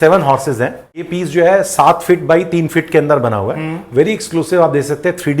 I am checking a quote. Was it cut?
yes; 1 cut; at 1.1 s

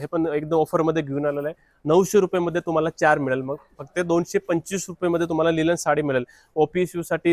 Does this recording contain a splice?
no; 0 cuts

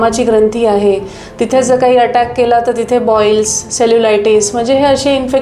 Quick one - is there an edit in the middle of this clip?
no; 0 cuts

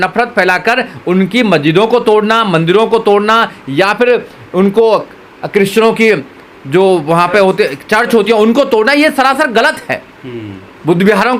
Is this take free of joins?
yes; 0 cuts

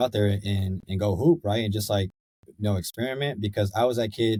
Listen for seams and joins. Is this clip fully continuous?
yes; 0 cuts

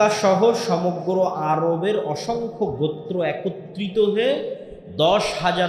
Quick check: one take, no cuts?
yes; 0 cuts

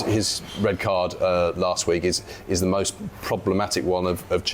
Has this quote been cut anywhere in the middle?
no; 0 cuts

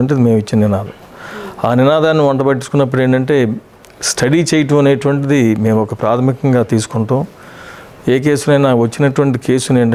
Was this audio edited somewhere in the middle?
no; 0 cuts

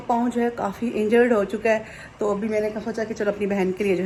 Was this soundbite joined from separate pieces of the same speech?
no; 0 cuts

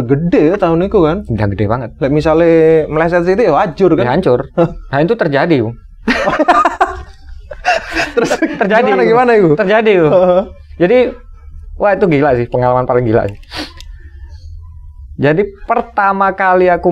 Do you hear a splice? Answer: no; 0 cuts

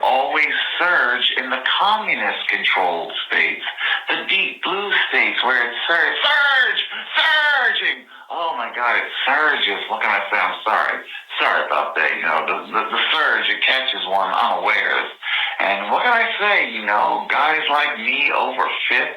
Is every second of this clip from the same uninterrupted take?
no; 1 cut; at 9.6 s

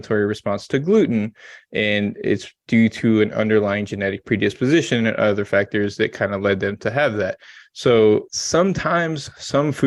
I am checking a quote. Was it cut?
no; 0 cuts

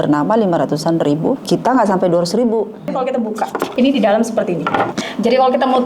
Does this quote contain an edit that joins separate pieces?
yes; 3 cuts; at 1.4 s, 3.2 s, 5.0 s

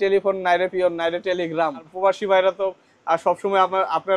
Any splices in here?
yes; 1 cut; at 1.9 s

